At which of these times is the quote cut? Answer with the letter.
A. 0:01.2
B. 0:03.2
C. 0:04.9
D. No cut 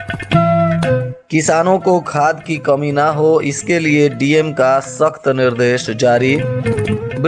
A